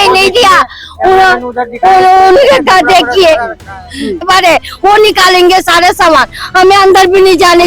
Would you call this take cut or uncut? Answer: cut